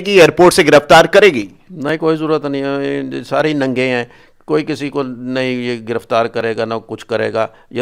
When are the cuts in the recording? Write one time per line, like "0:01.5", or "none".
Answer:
none